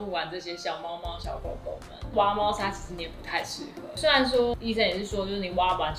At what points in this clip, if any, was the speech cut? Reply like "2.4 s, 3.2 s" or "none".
3.9 s